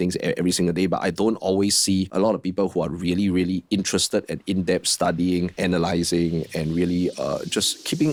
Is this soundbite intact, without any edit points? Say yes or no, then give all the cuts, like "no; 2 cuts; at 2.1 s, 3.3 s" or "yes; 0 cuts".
yes; 0 cuts